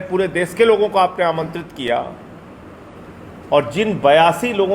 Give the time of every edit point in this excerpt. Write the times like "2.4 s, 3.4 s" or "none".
none